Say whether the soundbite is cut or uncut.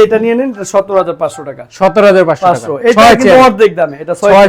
uncut